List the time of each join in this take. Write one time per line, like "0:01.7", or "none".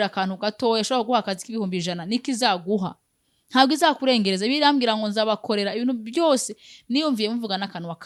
none

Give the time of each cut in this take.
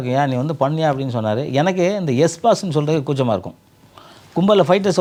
none

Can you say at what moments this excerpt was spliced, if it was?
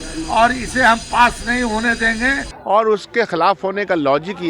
0:02.5

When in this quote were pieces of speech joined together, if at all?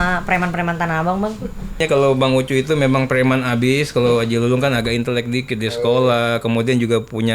0:01.8

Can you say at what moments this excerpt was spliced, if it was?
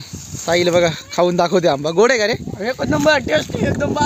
none

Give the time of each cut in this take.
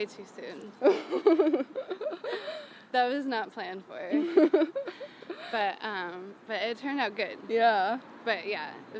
none

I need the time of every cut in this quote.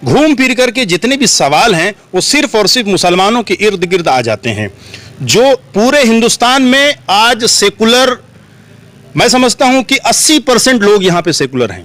none

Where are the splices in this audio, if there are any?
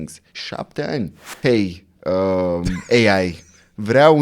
0:01.2

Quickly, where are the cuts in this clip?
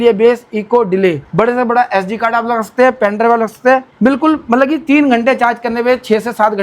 0:01.2
0:03.9

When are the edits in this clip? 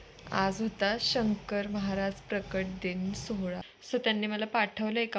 0:03.6

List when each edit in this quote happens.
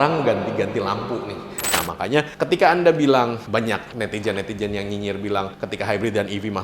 0:01.8

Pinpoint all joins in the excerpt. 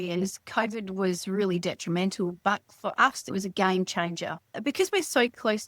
0:03.3
0:04.5

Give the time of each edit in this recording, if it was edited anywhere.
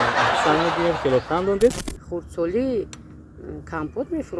0:01.9

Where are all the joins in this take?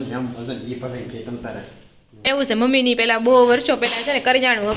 0:02.3

